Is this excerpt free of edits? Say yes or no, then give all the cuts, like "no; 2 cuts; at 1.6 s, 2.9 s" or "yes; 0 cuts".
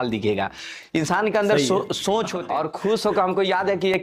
no; 1 cut; at 2.4 s